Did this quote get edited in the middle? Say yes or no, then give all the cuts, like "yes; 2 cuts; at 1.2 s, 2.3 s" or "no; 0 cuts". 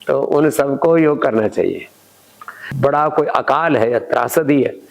yes; 1 cut; at 2.7 s